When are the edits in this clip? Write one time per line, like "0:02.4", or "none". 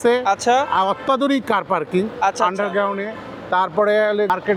none